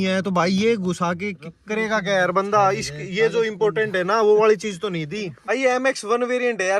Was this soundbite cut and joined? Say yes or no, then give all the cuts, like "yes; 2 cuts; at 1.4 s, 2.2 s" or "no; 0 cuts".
no; 0 cuts